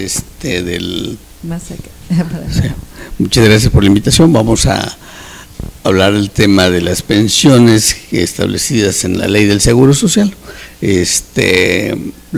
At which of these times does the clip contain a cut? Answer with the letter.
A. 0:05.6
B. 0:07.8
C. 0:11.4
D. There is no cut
C